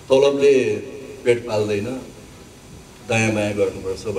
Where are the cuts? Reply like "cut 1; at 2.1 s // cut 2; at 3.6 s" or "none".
none